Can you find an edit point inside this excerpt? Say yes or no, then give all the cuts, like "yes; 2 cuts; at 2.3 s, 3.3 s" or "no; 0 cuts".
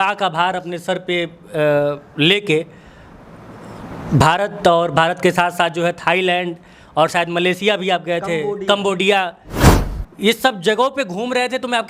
no; 0 cuts